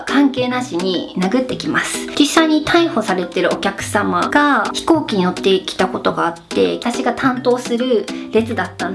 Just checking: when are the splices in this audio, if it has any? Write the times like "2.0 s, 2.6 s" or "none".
2.0 s, 6.8 s

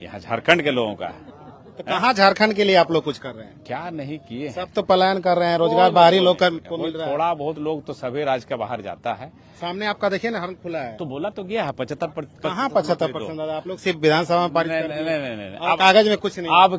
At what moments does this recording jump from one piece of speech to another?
none

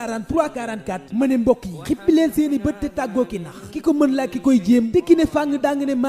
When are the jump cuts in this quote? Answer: 1.0 s

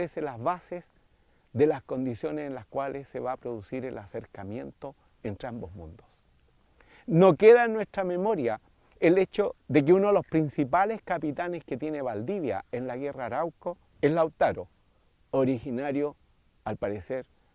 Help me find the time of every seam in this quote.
4.0 s

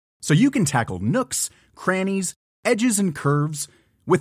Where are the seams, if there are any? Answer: none

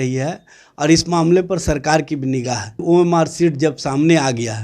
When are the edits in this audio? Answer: 2.8 s

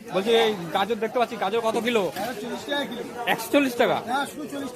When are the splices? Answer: none

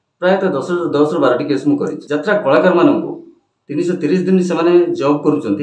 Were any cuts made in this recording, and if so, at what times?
2.0 s

